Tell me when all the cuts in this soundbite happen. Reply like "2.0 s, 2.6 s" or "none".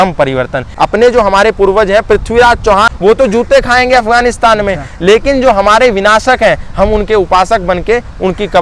0.8 s, 2.9 s